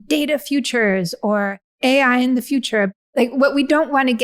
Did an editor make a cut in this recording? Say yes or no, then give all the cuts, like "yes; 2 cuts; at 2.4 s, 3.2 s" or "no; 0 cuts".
yes; 2 cuts; at 1.8 s, 2.9 s